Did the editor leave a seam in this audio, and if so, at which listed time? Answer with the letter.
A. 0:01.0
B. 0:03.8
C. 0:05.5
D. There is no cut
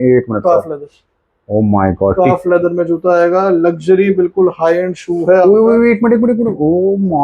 D